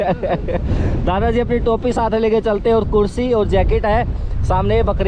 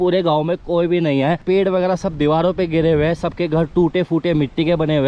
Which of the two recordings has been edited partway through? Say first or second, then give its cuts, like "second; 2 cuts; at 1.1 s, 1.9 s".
second; 1 cut; at 1.4 s